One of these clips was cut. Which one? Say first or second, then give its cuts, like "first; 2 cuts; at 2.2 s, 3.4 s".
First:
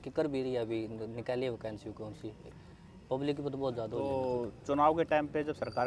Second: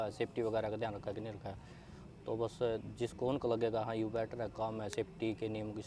first; 2 cuts; at 2.5 s, 4.0 s